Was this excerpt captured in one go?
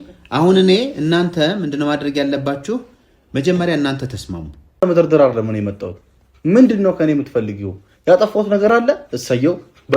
no; 1 cut; at 4.8 s

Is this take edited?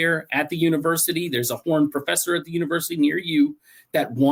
no; 0 cuts

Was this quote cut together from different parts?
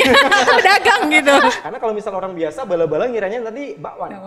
yes; 1 cut; at 1.7 s

